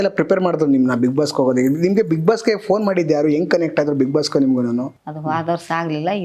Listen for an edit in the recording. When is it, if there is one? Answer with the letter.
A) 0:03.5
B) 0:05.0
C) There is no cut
B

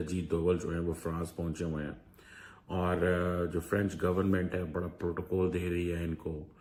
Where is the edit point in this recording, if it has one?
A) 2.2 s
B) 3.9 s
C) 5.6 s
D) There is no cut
D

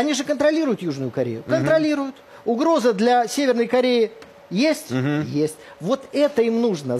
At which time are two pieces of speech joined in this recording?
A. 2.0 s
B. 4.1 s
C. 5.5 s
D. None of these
D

